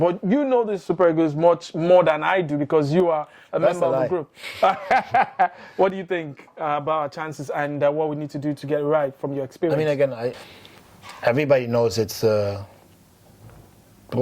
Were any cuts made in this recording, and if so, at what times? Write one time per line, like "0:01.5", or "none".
0:10.4